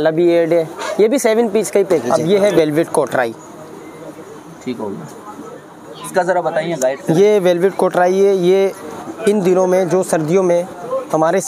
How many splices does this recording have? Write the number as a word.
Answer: one